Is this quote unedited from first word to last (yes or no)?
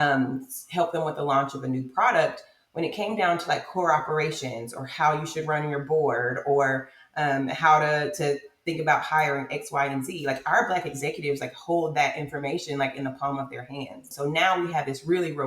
no